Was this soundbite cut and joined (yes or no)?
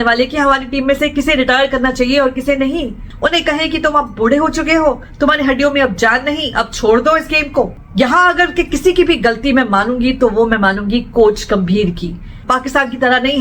yes